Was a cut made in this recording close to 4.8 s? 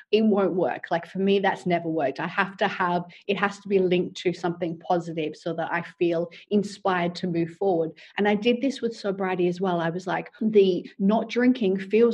no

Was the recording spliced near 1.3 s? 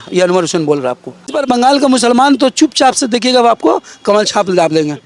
yes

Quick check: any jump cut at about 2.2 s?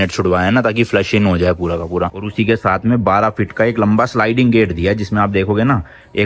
yes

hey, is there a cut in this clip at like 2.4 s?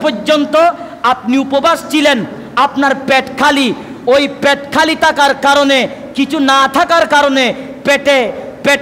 no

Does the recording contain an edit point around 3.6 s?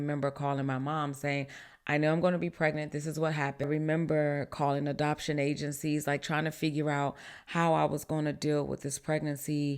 yes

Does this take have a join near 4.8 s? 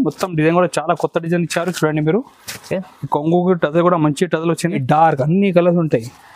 yes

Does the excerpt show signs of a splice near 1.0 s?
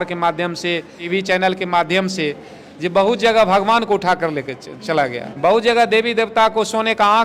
yes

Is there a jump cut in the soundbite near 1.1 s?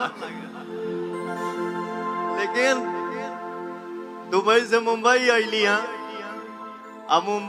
no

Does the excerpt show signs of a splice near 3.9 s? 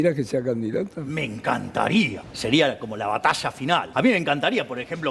yes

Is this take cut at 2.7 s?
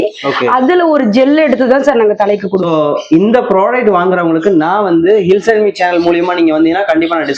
yes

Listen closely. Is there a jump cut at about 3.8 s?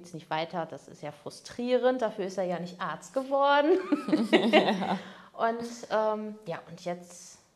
no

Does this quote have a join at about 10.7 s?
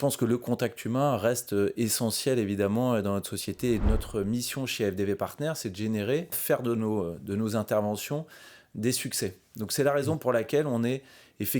no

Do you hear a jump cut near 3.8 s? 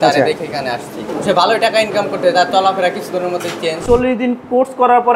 yes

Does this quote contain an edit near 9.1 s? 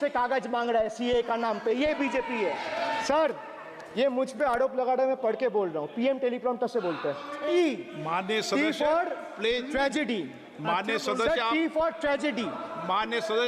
no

